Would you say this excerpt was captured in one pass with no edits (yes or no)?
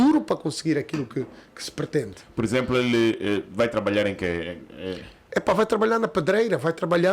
yes